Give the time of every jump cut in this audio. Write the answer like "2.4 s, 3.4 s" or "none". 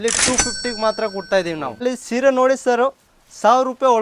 1.7 s